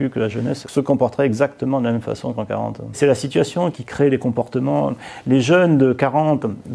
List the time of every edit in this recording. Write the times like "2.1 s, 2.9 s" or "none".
3.0 s

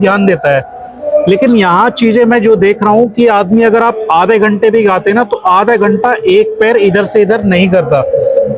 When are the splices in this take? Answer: none

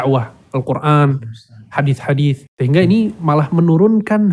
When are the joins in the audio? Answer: 2.5 s

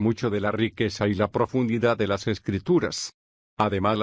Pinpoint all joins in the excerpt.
none

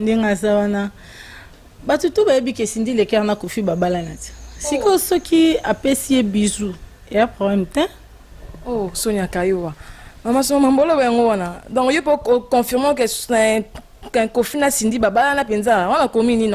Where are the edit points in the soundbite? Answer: none

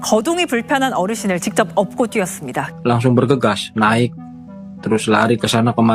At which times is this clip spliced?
2.6 s

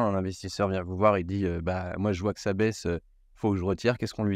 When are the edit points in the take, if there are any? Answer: none

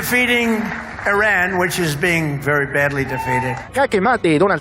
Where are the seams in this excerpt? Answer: 3.6 s

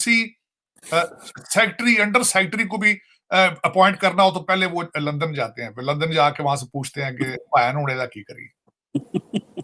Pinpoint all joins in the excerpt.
none

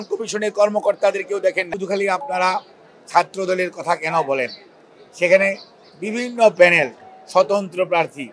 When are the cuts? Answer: 1.6 s

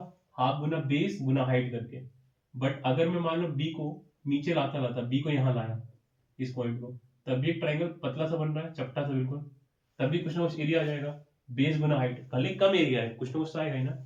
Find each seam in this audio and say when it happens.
none

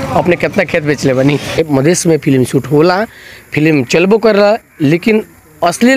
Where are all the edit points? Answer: 1.6 s

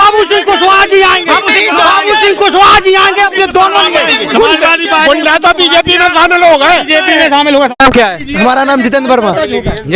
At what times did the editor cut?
none

